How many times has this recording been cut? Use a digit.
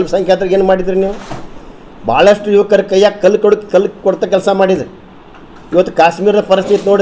0